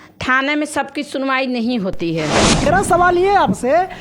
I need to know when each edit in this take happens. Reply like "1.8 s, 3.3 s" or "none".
2.6 s